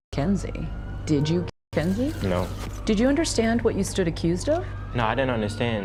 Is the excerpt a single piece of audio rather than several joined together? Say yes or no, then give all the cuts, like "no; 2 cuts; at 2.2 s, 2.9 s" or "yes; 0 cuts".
yes; 0 cuts